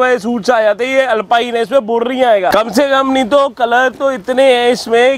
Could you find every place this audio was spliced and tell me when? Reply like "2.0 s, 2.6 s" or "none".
2.5 s